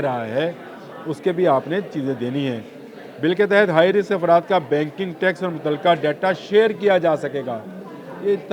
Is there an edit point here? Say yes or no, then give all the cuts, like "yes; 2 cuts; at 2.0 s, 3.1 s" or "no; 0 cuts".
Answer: no; 0 cuts